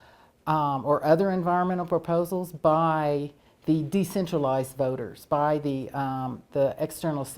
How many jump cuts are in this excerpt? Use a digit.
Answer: 0